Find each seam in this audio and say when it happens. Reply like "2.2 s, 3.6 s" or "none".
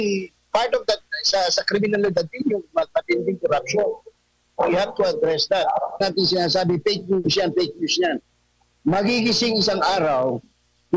6.0 s